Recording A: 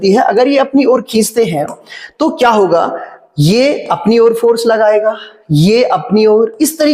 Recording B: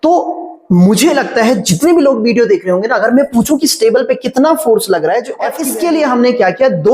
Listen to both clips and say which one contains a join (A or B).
B